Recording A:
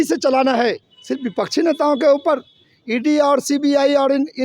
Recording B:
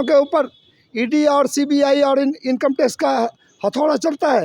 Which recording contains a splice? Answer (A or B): A